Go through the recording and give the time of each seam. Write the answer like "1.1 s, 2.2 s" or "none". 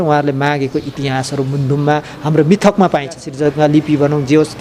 3.3 s